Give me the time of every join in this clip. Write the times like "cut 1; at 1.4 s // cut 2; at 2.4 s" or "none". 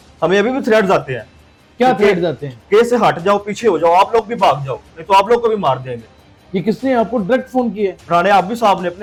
none